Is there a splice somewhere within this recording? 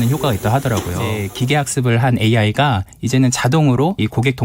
yes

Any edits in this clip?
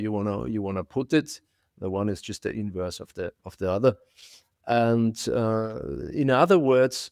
no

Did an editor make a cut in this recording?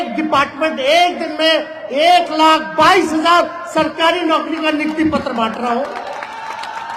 no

